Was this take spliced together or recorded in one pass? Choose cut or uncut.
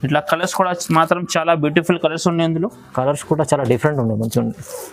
uncut